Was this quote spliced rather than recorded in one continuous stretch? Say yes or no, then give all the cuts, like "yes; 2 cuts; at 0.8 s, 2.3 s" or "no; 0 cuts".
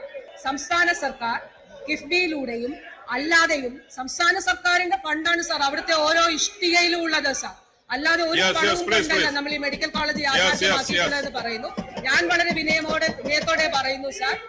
no; 0 cuts